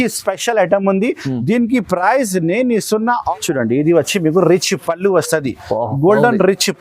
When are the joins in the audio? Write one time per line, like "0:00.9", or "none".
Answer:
0:03.2